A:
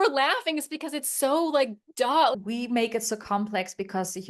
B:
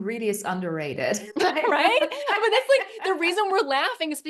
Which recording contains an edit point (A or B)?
A